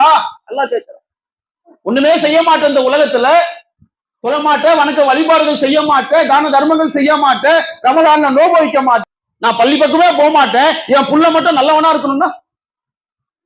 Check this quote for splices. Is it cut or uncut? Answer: cut